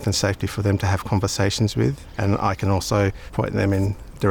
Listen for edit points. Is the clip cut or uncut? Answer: cut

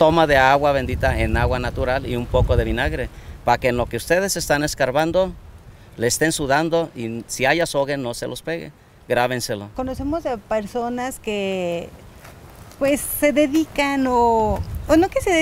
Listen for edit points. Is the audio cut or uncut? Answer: uncut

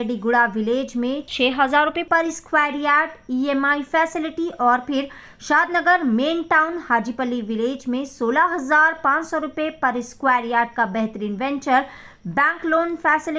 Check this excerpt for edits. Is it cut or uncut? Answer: uncut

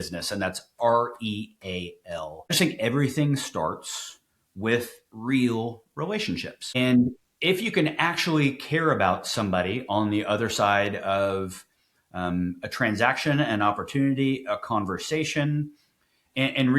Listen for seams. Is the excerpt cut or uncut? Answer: cut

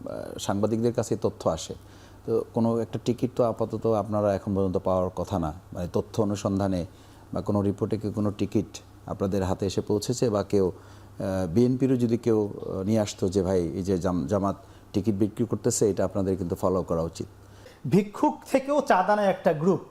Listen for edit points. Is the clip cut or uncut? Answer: cut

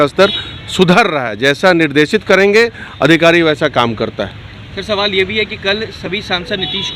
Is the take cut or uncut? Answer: uncut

